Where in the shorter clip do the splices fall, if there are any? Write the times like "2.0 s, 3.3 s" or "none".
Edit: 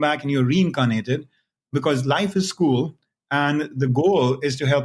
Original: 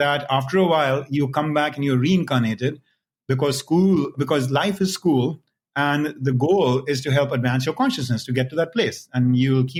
1.7 s